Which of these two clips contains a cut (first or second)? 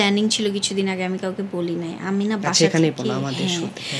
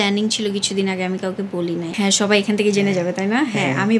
second